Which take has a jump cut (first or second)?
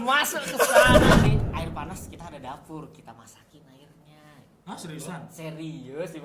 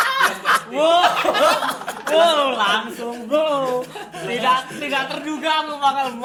first